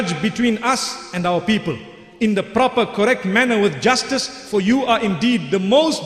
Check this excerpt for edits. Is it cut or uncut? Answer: uncut